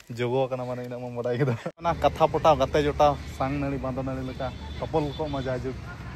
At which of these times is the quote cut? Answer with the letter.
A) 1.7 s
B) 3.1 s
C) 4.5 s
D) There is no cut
A